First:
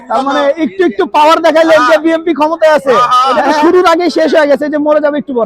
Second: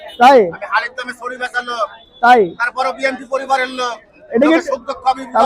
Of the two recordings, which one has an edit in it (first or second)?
first